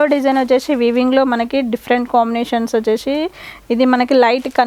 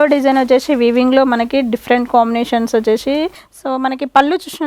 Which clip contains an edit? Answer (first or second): second